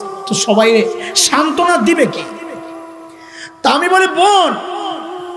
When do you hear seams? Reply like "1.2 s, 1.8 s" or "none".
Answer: 2.2 s, 3.6 s